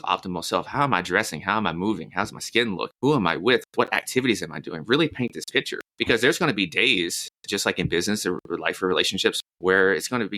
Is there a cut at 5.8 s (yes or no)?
yes